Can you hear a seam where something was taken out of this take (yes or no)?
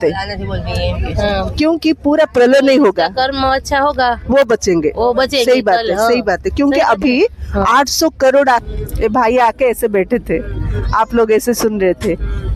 yes